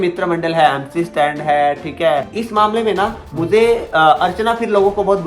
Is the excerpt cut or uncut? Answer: cut